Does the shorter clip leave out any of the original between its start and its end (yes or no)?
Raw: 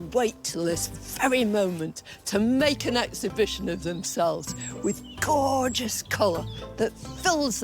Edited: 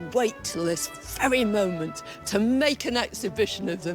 no